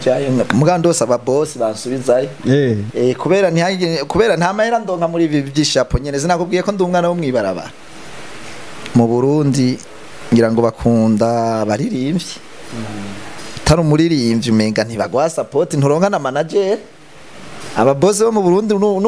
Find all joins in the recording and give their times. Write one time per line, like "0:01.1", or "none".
0:07.6